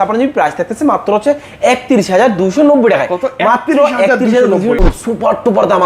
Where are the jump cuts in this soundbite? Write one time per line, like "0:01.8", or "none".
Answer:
0:04.8